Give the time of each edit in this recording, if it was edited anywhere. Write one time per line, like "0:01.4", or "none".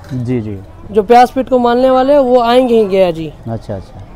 none